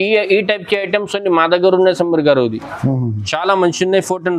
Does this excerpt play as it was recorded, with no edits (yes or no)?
yes